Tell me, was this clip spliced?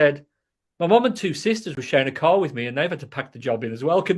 no; 0 cuts

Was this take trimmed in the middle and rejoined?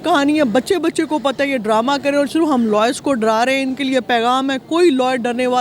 no; 0 cuts

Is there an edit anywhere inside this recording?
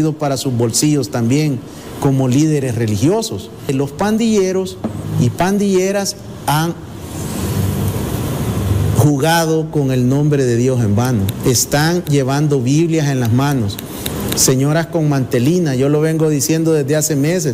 yes; 1 cut; at 3.6 s

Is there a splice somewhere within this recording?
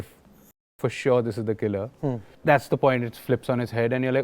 yes; 1 cut; at 2.3 s

